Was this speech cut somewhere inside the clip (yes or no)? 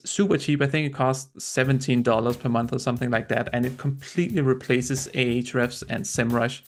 no